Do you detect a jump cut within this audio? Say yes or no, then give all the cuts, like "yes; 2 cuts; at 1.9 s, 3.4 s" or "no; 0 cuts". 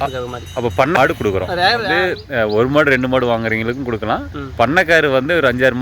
yes; 2 cuts; at 1.0 s, 2.0 s